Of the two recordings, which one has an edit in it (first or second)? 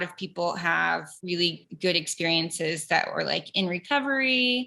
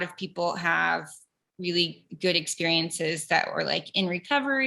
first